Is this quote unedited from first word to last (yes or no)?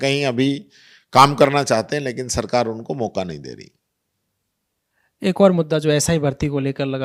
yes